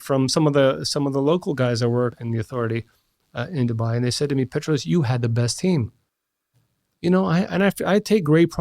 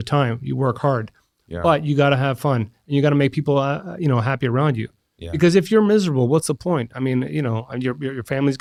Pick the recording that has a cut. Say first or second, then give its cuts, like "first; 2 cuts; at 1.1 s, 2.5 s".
first; 1 cut; at 2.2 s